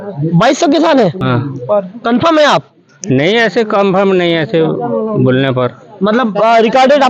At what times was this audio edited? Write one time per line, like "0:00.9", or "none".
none